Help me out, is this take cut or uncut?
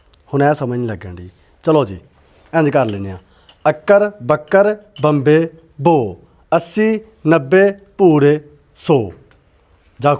uncut